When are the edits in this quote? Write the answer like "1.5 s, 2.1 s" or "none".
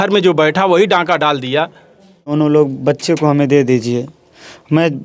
2.3 s